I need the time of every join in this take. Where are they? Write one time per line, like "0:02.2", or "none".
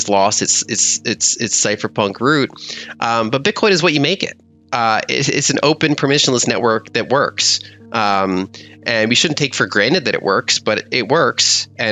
none